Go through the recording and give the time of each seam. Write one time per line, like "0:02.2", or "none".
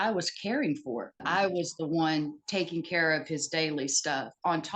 0:01.2